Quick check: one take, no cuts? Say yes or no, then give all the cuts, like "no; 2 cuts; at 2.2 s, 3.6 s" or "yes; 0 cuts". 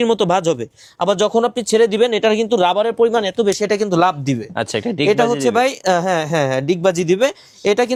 yes; 0 cuts